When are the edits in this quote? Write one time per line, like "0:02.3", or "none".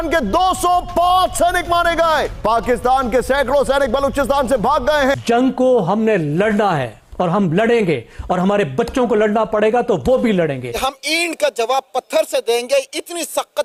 none